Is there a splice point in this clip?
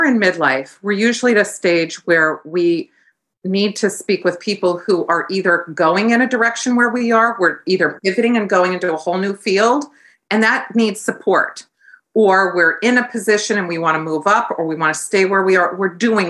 no; 0 cuts

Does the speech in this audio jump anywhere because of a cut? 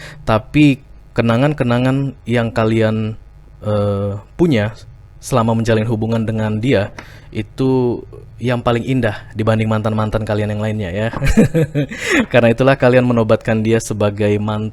no; 0 cuts

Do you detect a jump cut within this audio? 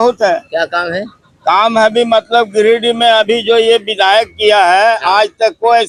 no; 0 cuts

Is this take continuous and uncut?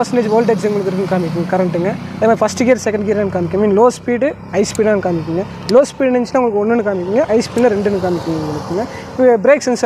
yes; 0 cuts

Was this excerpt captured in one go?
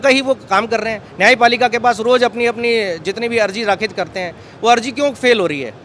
yes; 0 cuts

